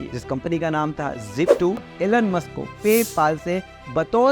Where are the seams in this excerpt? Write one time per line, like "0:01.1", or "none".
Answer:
0:01.8